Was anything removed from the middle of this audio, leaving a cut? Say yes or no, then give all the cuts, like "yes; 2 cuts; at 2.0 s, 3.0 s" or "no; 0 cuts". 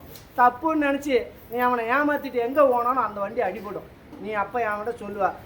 no; 0 cuts